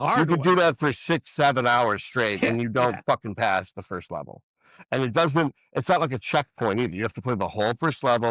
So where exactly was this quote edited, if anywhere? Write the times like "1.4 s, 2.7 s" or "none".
none

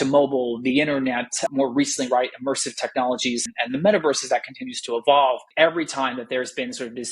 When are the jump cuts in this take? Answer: 3.5 s, 5.5 s

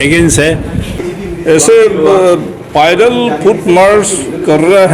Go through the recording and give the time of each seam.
1.1 s

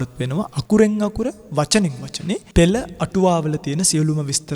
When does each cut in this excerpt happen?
2.5 s

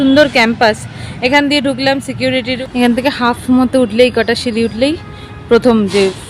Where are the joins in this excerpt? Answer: 2.5 s

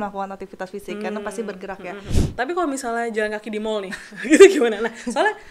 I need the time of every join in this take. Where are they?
2.2 s

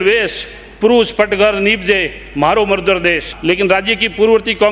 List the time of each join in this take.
3.3 s

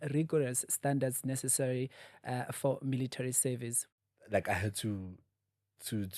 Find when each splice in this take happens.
3.8 s

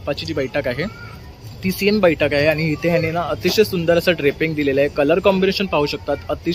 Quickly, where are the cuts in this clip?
none

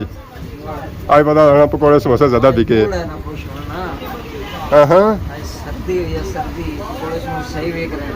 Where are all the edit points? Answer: none

